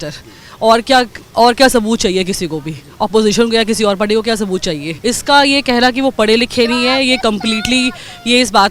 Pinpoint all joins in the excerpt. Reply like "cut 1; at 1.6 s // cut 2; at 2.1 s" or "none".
cut 1; at 4.9 s